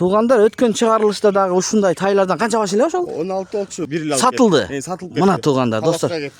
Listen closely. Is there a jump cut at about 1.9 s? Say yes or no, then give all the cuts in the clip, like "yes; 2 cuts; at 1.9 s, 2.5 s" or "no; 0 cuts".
no; 1 cut; at 3.8 s